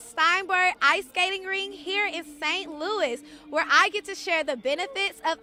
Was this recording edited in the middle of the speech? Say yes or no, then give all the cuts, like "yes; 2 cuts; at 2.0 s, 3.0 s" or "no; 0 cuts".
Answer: no; 0 cuts